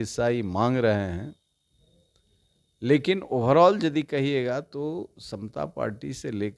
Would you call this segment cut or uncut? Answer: uncut